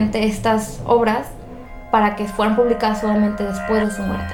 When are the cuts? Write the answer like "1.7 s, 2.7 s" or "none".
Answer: none